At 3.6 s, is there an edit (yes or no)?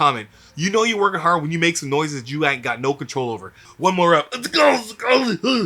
yes